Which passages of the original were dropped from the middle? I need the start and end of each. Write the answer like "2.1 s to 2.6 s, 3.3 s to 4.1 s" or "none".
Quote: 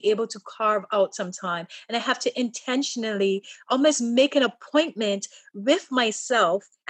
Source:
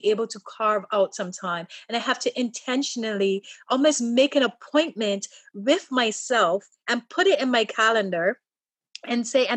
none